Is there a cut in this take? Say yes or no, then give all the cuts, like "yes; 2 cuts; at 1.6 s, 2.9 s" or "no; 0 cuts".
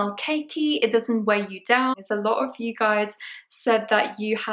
yes; 1 cut; at 2.0 s